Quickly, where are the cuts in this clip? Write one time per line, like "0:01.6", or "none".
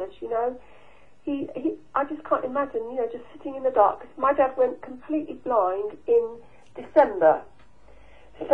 0:04.6

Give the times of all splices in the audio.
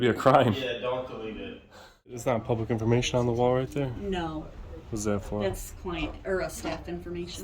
0:02.2

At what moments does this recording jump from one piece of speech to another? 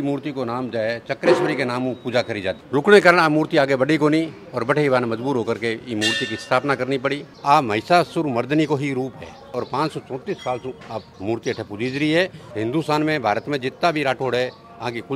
0:02.6
0:07.3
0:11.1
0:12.4

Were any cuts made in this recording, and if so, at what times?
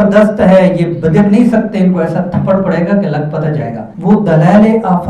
0:03.9

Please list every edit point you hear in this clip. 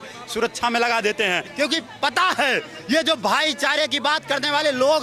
0:01.5

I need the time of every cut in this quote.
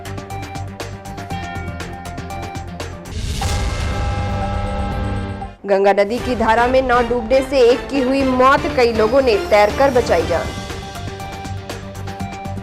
0:03.0

